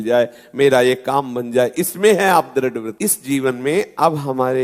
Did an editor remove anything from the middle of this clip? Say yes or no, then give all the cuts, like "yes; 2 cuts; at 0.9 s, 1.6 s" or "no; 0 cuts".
yes; 1 cut; at 2.9 s